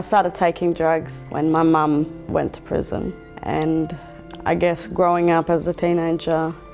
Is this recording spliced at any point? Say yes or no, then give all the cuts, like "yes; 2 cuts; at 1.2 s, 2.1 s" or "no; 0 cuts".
yes; 3 cuts; at 1.2 s, 2.2 s, 3.3 s